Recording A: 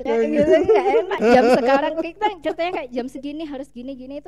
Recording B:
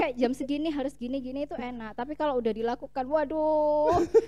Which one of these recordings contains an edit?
A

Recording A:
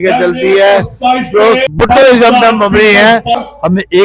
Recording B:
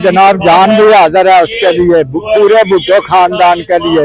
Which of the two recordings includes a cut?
A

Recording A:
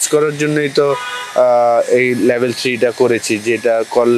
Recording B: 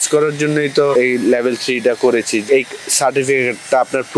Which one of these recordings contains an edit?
B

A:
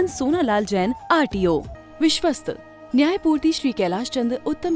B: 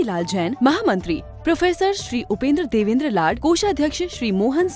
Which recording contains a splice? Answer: A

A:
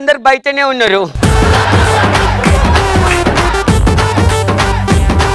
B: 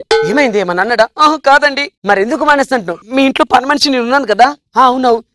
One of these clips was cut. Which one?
B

